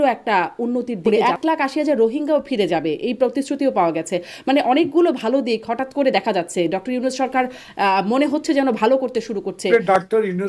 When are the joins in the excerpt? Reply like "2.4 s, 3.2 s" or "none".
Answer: 1.0 s, 9.6 s